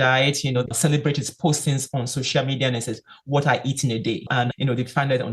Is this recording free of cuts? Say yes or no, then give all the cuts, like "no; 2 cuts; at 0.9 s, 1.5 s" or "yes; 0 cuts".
no; 2 cuts; at 0.7 s, 4.4 s